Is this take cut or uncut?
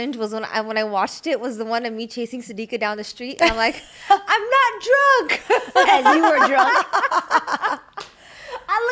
uncut